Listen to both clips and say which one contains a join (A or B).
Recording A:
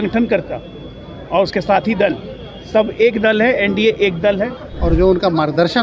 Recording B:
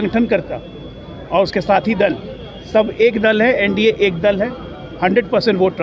A